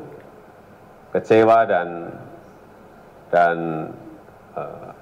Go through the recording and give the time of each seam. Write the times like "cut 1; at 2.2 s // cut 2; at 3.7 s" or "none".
none